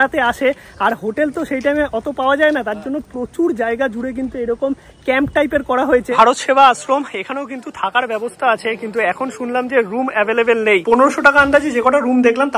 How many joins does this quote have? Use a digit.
2